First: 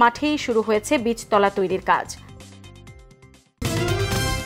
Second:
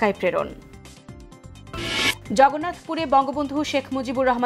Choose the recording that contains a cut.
first; 1 cut; at 3.5 s

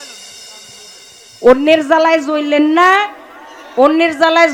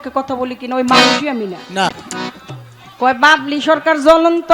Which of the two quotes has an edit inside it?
second; 1 cut; at 1.9 s

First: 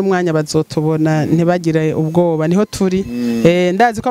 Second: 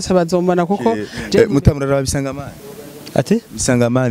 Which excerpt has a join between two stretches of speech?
second; 1 cut; at 1.2 s

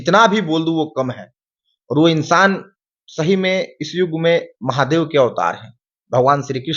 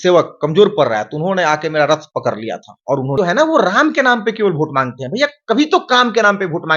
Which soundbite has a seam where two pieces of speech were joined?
second; 1 cut; at 3.2 s

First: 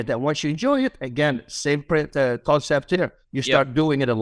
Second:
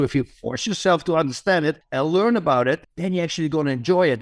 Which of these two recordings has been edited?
second; 2 cuts; at 1.8 s, 2.9 s

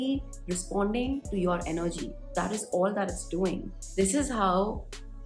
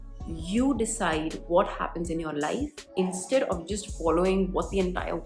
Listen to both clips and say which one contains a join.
first; 1 cut; at 3.8 s

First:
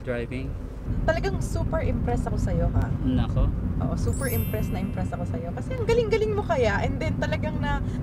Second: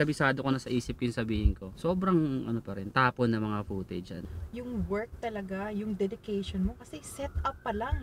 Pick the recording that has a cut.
second; 2 cuts; at 1.7 s, 4.2 s

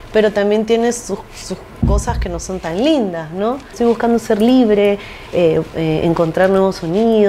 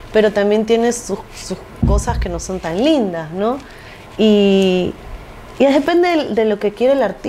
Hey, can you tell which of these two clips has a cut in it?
first; 1 cut; at 3.7 s

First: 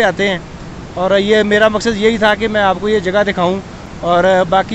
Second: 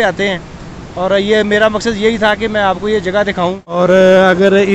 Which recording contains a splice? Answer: second; 1 cut; at 3.7 s

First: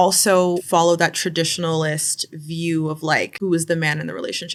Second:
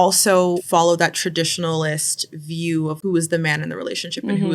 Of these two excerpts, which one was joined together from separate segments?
second; 1 cut; at 3.0 s

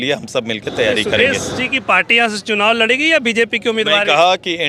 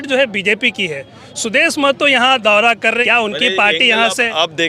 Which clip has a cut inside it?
second; 1 cut; at 3.0 s

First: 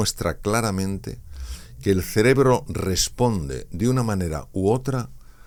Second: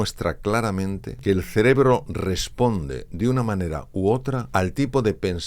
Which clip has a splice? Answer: second; 2 cuts; at 1.1 s, 4.4 s

